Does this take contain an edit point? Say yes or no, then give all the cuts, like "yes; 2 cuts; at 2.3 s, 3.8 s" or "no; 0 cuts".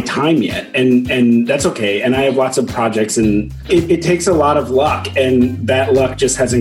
yes; 1 cut; at 3.6 s